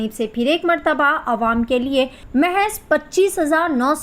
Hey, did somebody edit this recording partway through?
yes; 1 cut; at 2.2 s

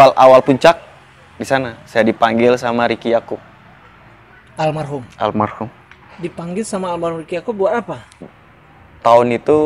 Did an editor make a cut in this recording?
yes; 1 cut; at 8.2 s

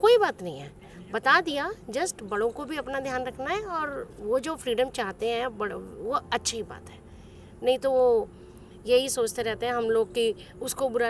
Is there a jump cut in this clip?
no; 0 cuts

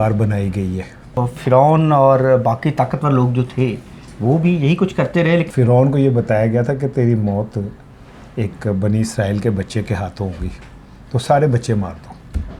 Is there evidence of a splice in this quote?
yes; 2 cuts; at 1.1 s, 5.5 s

